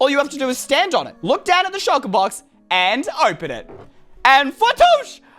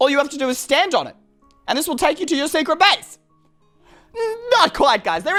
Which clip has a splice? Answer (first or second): first